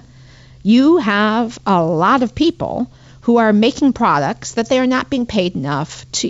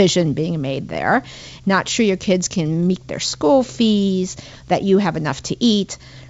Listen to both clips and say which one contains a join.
second; 1 cut; at 1.5 s

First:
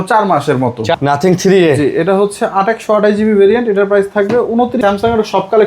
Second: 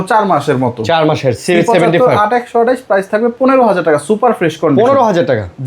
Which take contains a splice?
first; 2 cuts; at 1.0 s, 4.8 s

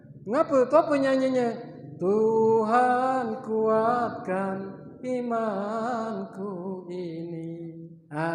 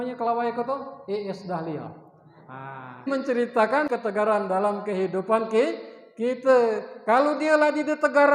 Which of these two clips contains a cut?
second; 2 cuts; at 3.1 s, 3.9 s

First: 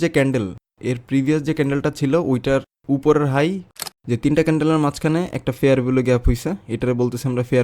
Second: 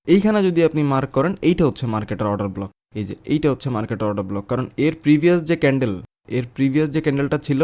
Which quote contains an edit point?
first; 1 cut; at 3.8 s

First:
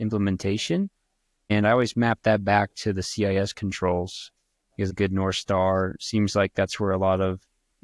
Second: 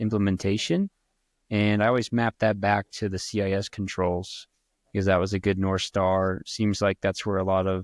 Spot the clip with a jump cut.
first; 2 cuts; at 1.5 s, 4.9 s

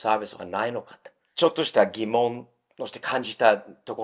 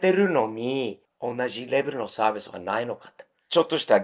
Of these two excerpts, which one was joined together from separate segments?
second; 1 cut; at 1.1 s

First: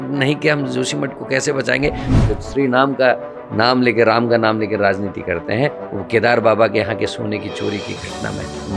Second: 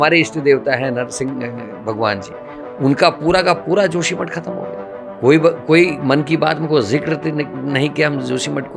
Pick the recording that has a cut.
first; 1 cut; at 2.1 s

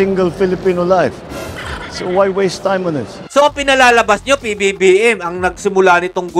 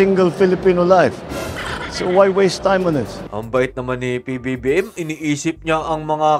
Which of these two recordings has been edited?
first; 1 cut; at 3.1 s

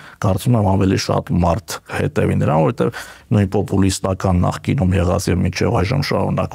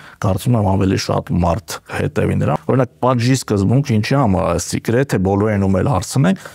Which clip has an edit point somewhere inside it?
second; 1 cut; at 2.5 s

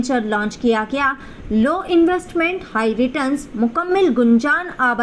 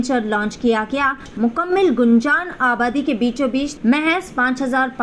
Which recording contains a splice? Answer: second; 2 cuts; at 1.3 s, 3.7 s

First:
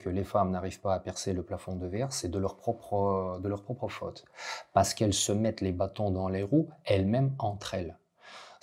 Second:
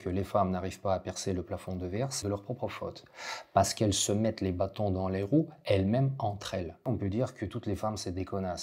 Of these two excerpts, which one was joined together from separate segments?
second; 2 cuts; at 2.2 s, 6.9 s

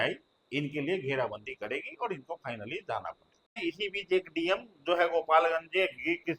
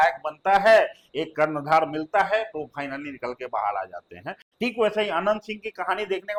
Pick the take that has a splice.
first; 1 cut; at 3.6 s

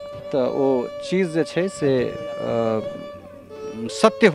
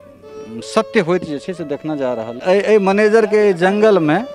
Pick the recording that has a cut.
second; 1 cut; at 2.3 s

